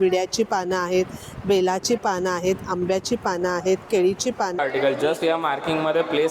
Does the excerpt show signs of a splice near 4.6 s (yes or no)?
yes